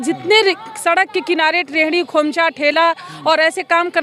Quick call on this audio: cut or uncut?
uncut